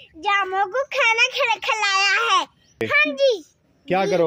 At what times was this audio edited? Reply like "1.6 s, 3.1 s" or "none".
2.8 s